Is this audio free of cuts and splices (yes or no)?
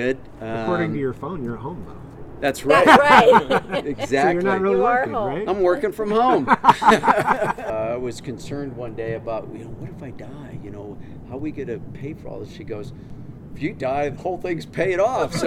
no